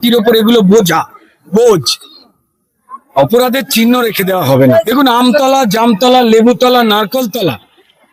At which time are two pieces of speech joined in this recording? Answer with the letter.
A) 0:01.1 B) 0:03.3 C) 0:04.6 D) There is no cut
C